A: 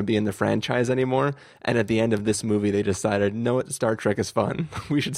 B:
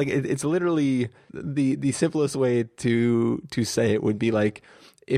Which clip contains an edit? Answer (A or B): B